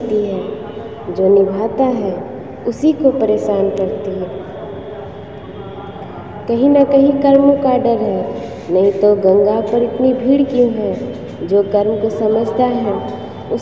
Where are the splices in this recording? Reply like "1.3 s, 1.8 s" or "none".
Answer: none

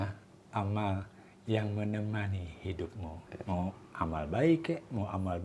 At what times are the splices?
3.3 s

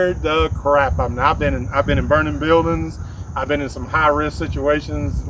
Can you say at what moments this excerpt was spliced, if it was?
none

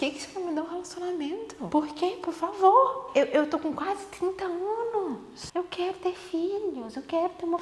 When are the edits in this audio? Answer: 1.6 s, 3.0 s, 5.3 s

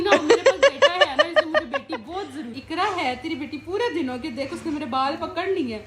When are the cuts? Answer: none

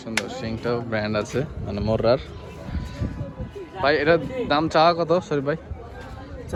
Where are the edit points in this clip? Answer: none

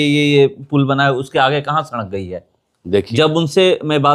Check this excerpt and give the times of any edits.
3.0 s

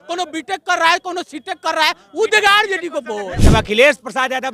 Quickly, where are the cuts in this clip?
3.4 s

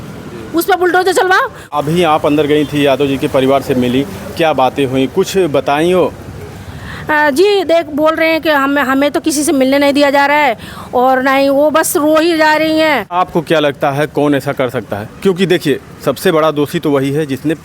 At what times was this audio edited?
1.7 s, 13.1 s

